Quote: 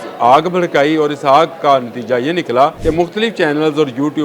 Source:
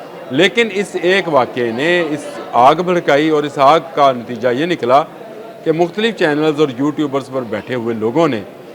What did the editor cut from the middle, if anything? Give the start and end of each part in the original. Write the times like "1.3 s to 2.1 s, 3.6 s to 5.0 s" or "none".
5.1 s to 5.6 s